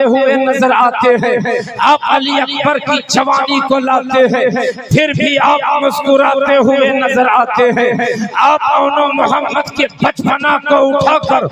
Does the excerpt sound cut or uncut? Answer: uncut